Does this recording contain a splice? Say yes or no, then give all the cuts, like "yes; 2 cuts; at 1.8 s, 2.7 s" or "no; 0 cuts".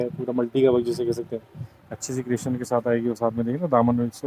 no; 0 cuts